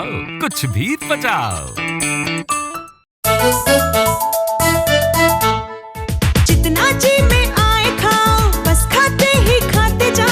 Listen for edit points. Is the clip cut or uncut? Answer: cut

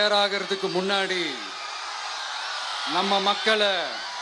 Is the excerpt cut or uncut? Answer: uncut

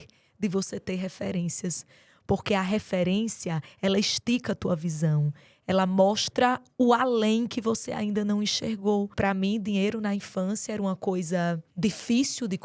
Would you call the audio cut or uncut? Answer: cut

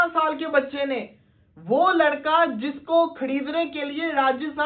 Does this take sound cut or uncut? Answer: uncut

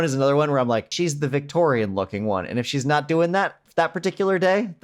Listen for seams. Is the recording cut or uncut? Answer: cut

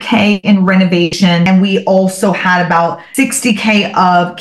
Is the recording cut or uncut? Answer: cut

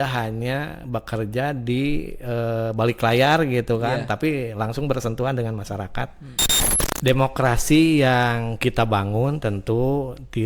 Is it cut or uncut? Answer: cut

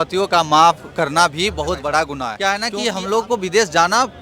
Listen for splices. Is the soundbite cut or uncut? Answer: cut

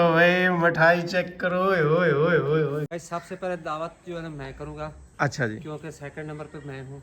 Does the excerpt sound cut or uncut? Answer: cut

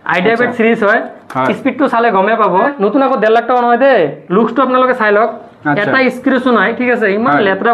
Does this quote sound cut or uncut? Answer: cut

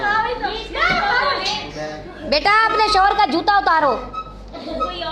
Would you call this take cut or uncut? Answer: uncut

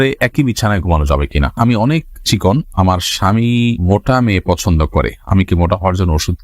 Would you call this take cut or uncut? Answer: cut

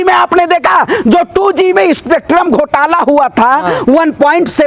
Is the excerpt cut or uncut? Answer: uncut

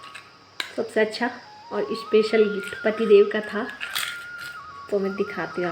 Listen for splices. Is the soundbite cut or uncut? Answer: uncut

